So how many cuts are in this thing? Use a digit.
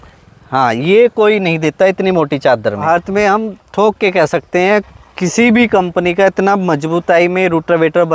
1